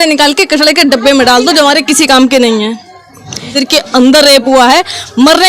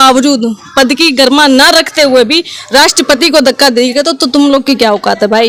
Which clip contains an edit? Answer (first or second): first